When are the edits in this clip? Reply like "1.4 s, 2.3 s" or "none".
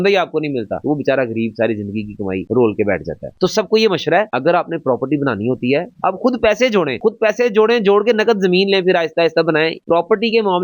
6.0 s, 9.8 s